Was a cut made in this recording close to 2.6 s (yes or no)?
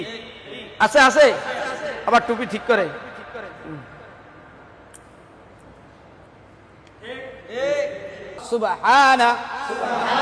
no